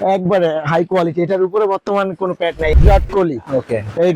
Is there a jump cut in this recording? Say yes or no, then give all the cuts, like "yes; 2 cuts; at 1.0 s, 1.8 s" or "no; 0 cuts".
yes; 1 cut; at 2.7 s